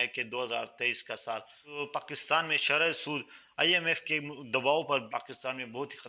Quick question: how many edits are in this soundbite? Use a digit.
2